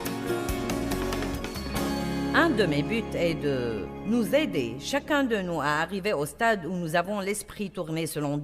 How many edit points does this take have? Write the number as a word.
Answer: one